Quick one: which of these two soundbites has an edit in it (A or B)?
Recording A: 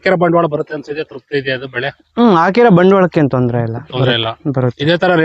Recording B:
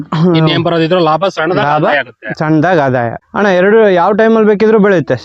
B